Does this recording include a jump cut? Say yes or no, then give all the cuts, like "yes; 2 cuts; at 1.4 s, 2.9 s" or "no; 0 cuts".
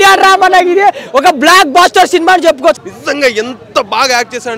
yes; 1 cut; at 2.8 s